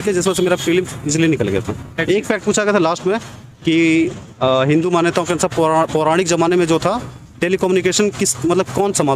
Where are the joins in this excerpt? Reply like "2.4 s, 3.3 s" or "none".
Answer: 1.9 s